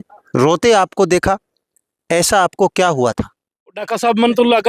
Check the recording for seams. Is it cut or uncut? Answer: cut